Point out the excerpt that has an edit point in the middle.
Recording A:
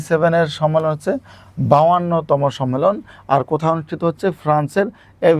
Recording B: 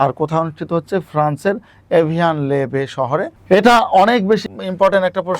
B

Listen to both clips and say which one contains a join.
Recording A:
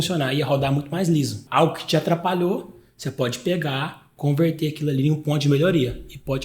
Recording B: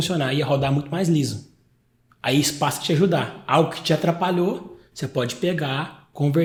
A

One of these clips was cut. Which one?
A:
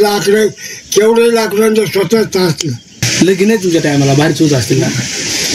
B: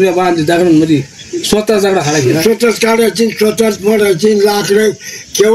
A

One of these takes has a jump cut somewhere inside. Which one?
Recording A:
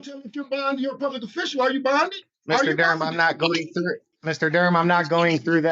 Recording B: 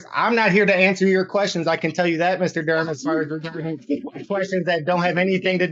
A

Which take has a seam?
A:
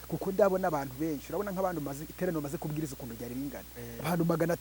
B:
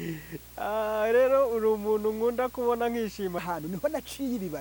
B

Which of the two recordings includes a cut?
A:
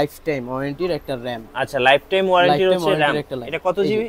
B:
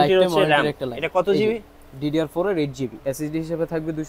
B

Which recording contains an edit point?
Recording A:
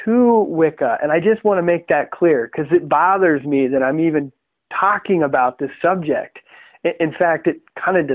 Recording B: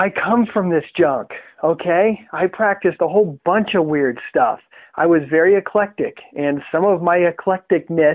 A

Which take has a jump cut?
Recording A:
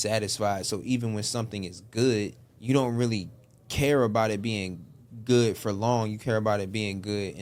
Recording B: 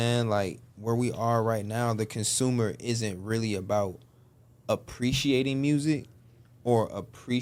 A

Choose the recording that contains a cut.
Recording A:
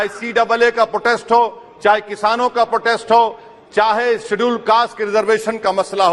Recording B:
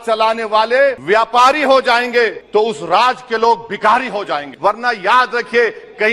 B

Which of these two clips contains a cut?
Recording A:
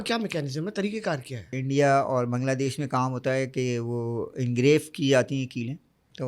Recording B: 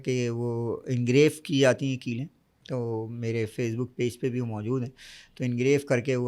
A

